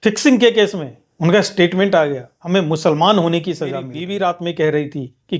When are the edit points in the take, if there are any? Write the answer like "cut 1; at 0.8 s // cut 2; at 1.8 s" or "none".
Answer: cut 1; at 4.0 s